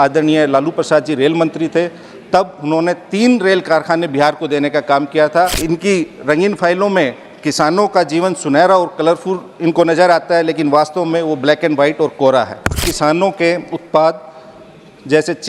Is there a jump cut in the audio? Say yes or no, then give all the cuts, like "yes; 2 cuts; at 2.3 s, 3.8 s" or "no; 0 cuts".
yes; 2 cuts; at 5.6 s, 12.8 s